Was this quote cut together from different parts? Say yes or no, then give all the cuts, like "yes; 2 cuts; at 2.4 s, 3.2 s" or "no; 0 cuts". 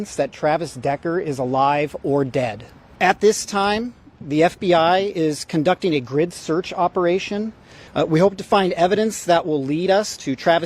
no; 0 cuts